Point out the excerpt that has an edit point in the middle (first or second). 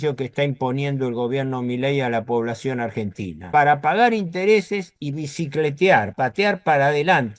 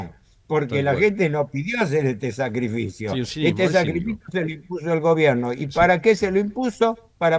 first